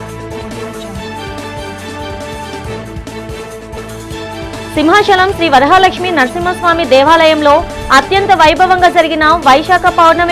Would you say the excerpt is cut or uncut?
uncut